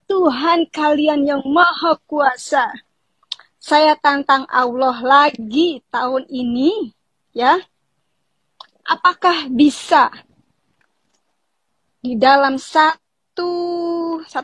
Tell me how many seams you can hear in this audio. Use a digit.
0